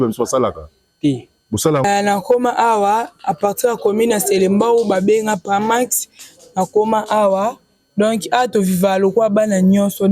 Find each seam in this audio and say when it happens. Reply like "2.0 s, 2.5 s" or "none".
1.8 s

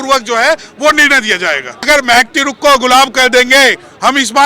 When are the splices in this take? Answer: 1.9 s

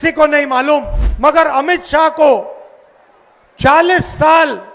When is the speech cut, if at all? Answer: 1.0 s

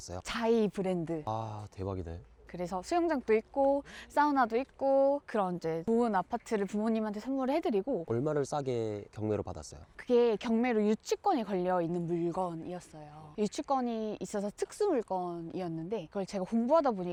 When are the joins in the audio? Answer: none

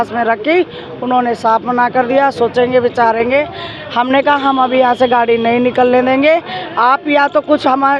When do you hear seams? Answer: none

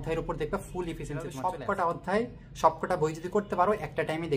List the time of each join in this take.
1.3 s

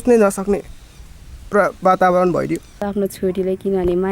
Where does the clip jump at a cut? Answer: 2.8 s

